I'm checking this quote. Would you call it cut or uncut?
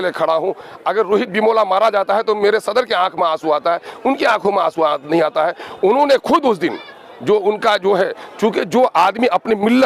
uncut